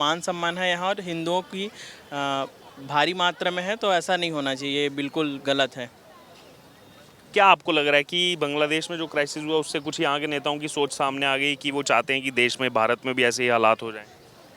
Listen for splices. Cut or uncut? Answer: uncut